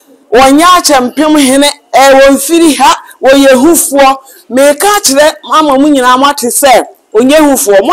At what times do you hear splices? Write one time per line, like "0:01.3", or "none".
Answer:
none